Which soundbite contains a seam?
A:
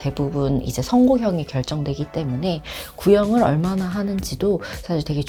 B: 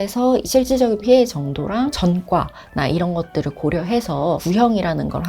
B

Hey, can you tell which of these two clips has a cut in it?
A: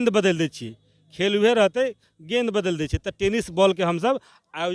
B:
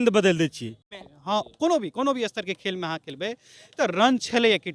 B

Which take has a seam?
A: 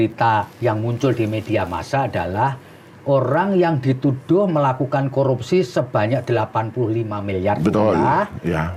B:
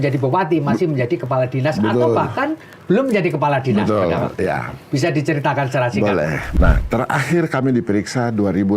B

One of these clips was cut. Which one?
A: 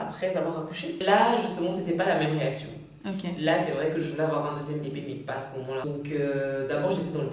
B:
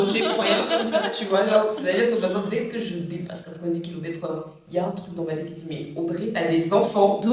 A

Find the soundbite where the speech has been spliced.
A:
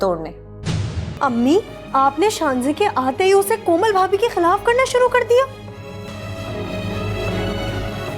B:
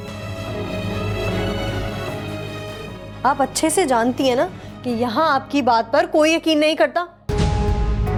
A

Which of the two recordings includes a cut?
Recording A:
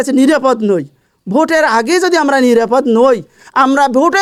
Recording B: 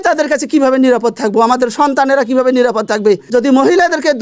B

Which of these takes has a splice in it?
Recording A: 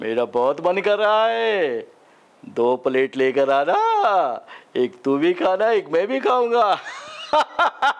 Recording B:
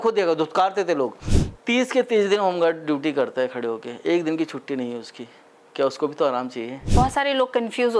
B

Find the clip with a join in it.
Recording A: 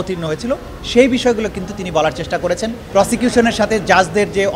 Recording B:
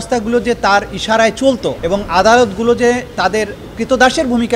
A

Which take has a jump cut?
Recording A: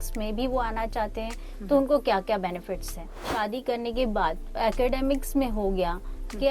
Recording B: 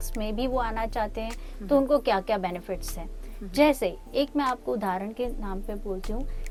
A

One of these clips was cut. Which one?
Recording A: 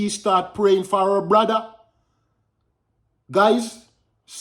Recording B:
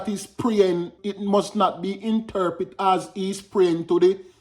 B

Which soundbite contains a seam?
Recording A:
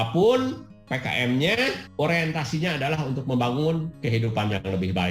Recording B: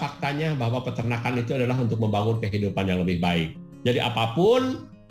A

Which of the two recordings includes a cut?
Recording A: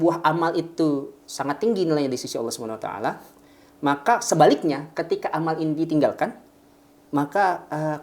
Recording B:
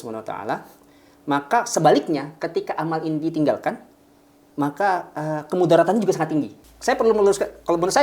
B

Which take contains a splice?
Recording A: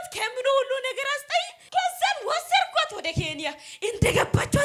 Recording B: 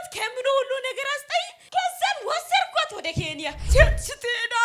B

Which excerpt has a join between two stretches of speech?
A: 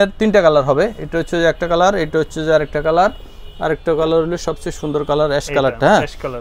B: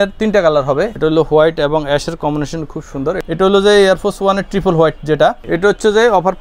B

